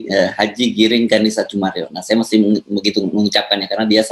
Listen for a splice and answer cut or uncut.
uncut